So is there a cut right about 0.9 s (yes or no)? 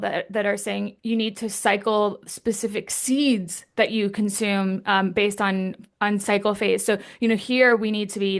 yes